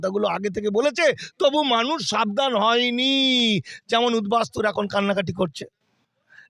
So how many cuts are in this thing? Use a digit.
0